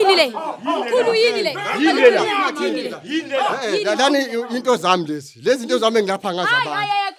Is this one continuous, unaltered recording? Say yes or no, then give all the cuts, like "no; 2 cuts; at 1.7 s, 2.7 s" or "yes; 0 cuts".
yes; 0 cuts